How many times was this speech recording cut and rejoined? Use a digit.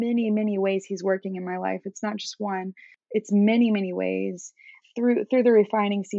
2